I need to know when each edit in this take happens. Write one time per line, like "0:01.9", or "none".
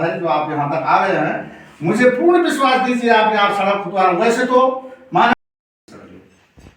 0:05.3